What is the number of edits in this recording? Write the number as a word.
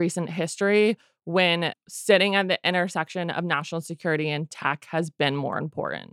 one